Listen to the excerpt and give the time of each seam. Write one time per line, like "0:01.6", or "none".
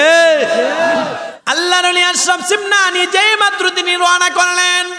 0:01.3